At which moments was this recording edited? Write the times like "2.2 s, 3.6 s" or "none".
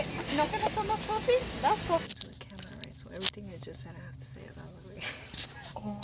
2.0 s